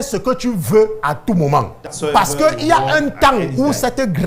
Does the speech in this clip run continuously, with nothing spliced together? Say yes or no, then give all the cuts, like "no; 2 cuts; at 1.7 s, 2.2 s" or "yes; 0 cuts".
no; 1 cut; at 1.8 s